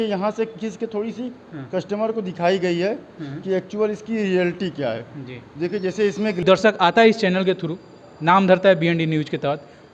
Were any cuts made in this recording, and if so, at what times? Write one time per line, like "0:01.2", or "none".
0:06.4

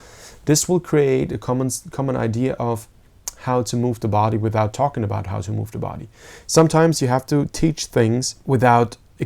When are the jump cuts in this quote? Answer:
0:08.3

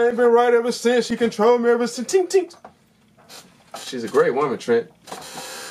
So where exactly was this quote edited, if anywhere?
none

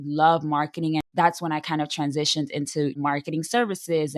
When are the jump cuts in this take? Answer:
0:01.0

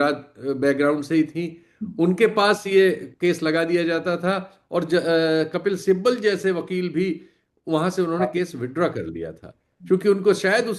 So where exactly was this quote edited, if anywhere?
none

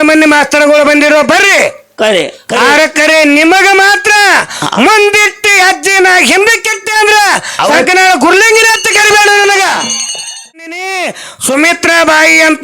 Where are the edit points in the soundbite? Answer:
0:10.8

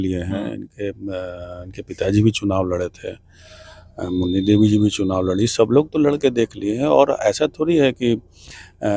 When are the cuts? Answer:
none

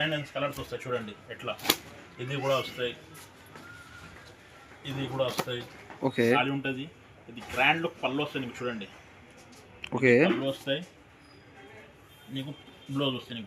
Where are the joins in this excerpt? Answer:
0:06.4

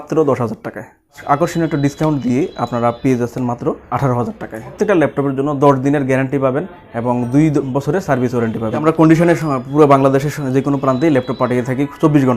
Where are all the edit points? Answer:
0:01.2
0:03.8
0:04.8
0:08.8

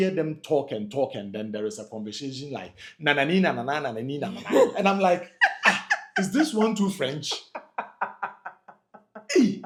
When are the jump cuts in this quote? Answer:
none

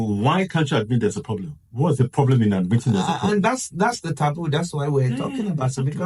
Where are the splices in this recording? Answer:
none

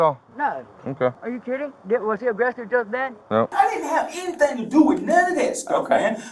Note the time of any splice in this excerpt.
0:01.2
0:03.5

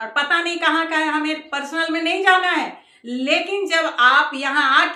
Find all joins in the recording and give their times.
none

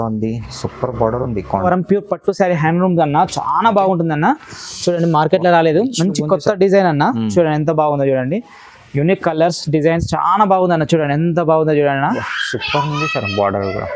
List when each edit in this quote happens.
0:01.7

